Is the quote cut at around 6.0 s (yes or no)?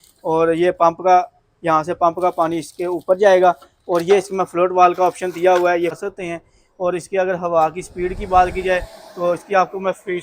yes